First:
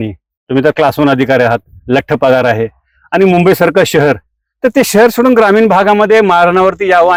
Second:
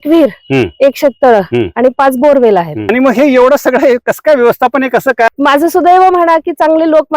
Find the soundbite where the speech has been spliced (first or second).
second